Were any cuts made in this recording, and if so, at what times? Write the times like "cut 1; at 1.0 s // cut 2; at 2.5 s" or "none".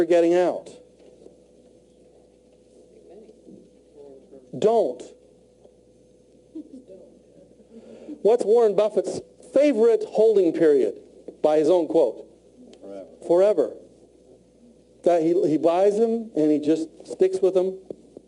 cut 1; at 4.5 s